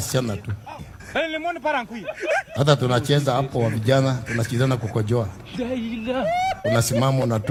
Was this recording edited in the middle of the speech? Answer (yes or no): no